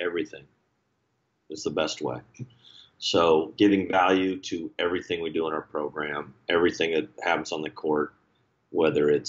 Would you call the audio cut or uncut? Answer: uncut